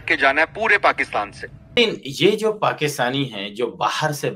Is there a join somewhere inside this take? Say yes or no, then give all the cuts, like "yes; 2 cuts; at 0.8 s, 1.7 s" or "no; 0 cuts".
yes; 1 cut; at 1.8 s